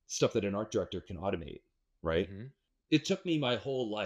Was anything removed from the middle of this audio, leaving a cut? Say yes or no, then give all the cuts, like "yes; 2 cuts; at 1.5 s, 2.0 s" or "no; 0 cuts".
yes; 1 cut; at 2.5 s